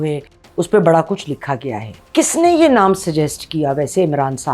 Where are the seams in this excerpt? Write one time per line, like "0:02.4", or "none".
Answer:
0:02.0